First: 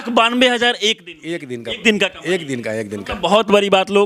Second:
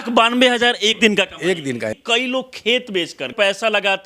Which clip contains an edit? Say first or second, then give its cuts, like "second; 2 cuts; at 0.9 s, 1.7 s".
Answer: second; 3 cuts; at 1.0 s, 2.0 s, 3.3 s